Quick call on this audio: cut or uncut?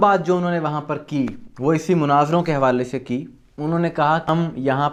uncut